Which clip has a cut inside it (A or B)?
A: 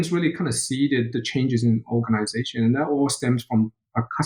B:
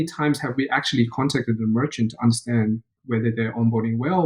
B